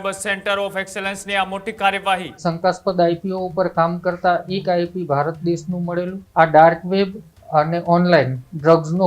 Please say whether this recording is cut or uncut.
cut